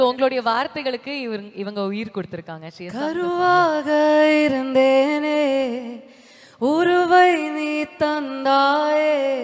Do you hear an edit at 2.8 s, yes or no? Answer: yes